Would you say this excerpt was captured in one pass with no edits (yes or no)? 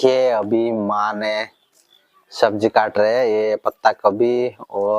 yes